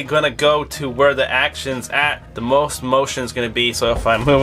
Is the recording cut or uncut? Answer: uncut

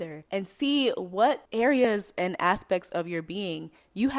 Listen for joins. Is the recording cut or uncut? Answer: uncut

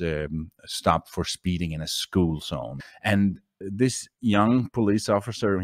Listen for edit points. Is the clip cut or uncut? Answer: cut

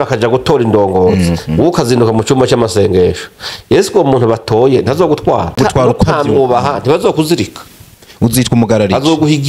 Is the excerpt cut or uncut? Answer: cut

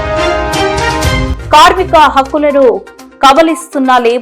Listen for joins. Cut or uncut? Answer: cut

